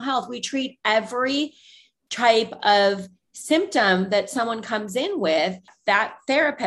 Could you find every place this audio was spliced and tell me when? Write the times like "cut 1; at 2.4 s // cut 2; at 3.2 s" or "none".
cut 1; at 5.7 s